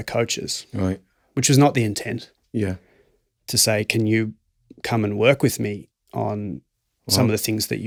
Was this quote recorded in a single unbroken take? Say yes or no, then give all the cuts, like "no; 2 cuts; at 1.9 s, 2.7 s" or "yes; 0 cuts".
yes; 0 cuts